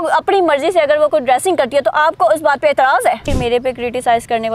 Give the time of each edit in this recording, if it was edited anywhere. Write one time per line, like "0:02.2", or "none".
0:03.3